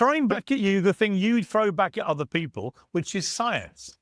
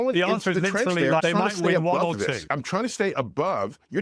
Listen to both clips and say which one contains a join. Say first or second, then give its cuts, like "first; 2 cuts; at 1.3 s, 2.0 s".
second; 2 cuts; at 1.2 s, 2.5 s